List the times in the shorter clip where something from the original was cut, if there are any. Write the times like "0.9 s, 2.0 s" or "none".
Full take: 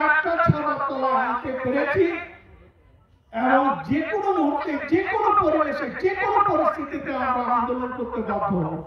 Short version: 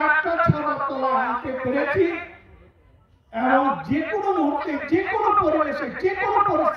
none